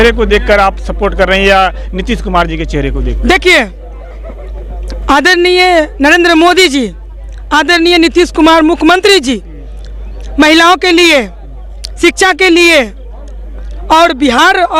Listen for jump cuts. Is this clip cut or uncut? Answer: uncut